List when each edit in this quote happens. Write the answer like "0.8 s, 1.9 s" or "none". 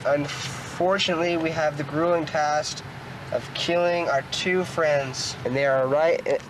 5.2 s

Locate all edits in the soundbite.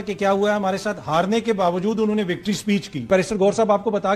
3.1 s

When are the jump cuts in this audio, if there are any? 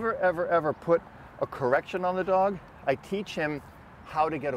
none

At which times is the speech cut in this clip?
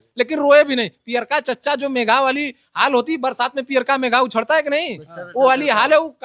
none

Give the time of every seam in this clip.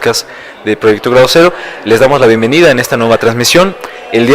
3.0 s

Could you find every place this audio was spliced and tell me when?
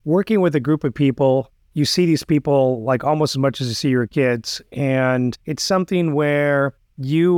5.5 s

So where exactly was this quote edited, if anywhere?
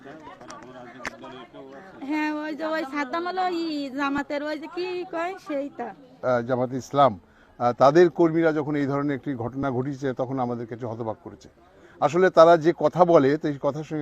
6.1 s

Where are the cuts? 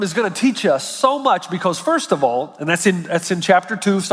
none

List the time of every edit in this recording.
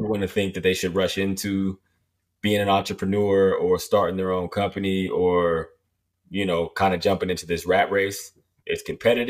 none

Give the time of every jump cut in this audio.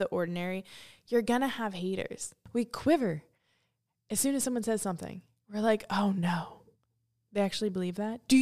2.4 s

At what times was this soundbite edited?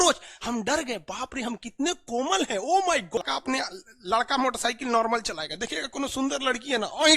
3.2 s

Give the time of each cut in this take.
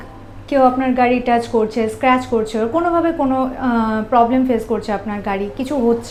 none

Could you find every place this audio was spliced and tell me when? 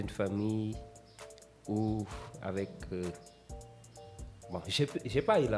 none

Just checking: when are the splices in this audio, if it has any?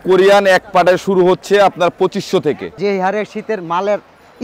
2.7 s

